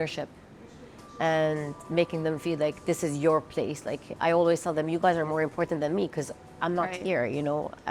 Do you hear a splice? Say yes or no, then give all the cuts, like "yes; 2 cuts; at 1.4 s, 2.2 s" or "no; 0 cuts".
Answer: no; 0 cuts